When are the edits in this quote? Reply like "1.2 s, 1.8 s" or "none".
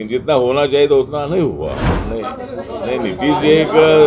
1.9 s